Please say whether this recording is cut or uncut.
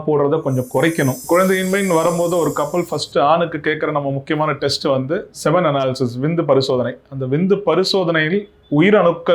cut